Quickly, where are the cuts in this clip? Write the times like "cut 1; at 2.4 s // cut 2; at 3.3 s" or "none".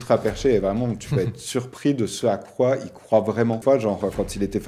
cut 1; at 3.6 s